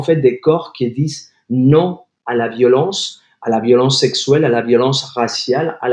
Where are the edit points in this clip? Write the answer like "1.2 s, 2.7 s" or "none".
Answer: none